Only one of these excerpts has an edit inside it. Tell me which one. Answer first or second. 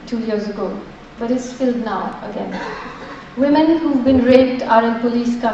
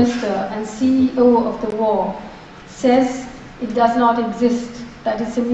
second